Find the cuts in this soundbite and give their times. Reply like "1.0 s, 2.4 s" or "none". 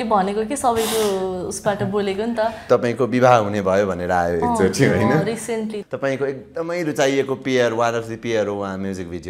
2.6 s, 5.8 s